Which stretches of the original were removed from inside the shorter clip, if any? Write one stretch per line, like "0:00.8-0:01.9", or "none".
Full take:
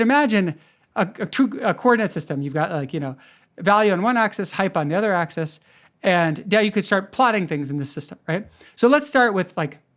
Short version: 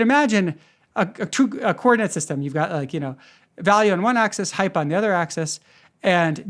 none